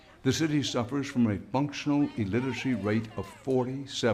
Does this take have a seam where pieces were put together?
yes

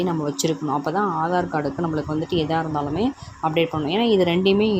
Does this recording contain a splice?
no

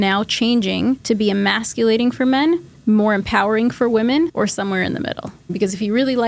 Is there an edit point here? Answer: yes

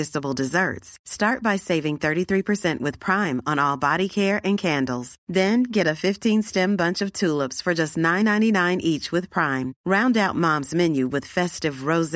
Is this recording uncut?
yes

